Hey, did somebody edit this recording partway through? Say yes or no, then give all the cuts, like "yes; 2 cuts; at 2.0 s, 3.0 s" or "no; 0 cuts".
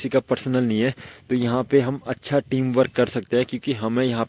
no; 0 cuts